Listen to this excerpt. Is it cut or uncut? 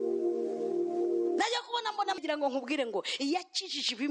cut